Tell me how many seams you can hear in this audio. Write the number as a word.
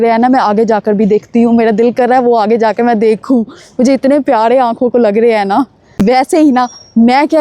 one